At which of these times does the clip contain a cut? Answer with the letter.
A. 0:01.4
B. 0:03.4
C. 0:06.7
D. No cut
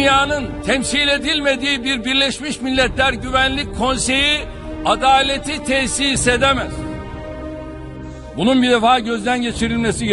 D